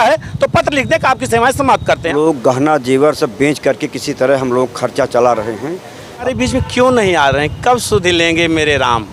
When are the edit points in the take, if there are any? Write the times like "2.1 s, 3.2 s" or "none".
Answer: 2.1 s, 6.2 s